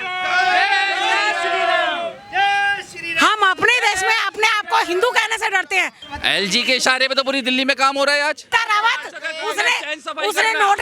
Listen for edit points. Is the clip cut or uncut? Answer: cut